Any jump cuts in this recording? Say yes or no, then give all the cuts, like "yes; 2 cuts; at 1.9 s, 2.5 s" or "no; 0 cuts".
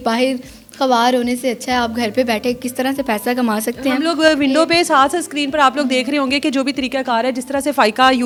no; 0 cuts